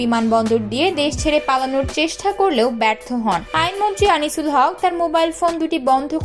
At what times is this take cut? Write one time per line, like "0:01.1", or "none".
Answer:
0:03.4